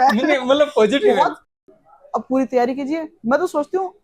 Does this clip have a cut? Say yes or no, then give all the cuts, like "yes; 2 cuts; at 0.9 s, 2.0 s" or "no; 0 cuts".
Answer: yes; 1 cut; at 1.5 s